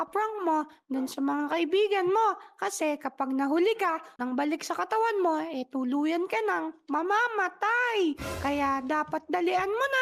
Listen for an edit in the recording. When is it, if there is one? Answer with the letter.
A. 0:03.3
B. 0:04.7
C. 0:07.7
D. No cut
D